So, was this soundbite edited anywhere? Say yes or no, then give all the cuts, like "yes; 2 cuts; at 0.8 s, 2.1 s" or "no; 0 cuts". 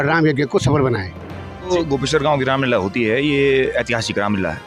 yes; 1 cut; at 1.7 s